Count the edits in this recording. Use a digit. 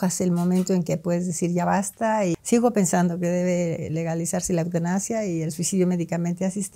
1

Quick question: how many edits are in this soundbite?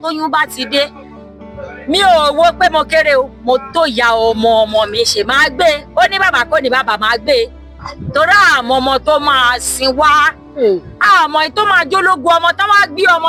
0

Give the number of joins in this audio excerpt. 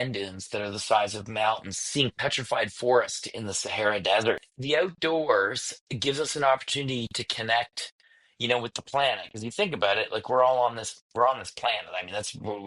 1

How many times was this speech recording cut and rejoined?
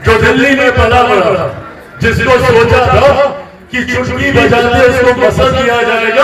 0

